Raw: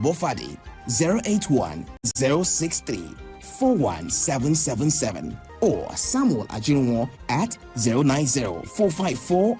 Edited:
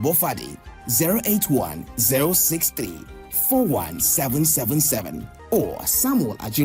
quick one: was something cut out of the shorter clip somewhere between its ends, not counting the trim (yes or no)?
yes